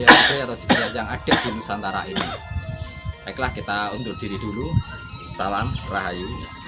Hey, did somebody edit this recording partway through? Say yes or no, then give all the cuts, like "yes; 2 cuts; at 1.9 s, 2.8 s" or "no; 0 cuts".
no; 0 cuts